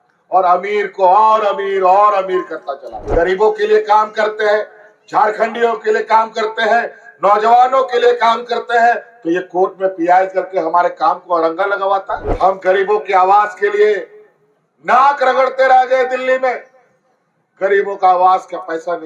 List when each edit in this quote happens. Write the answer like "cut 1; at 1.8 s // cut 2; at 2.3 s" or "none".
cut 1; at 3.1 s // cut 2; at 12.2 s

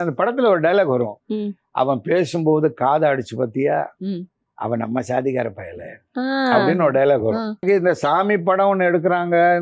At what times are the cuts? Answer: cut 1; at 7.6 s

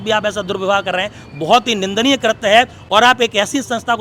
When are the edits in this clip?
none

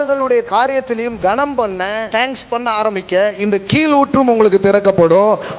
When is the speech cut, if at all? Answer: cut 1; at 2.1 s

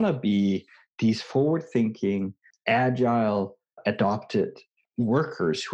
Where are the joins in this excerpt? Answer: cut 1; at 2.5 s // cut 2; at 3.8 s // cut 3; at 4.8 s

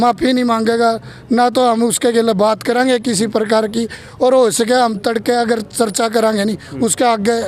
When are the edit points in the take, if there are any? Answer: none

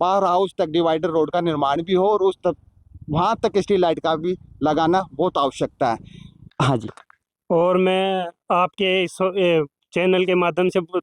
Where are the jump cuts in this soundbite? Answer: cut 1; at 6.5 s

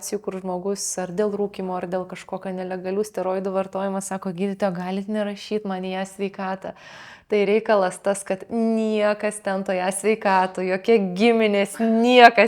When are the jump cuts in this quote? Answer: none

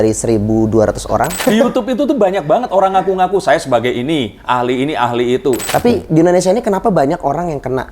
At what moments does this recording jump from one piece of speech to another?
cut 1; at 1.4 s // cut 2; at 5.6 s

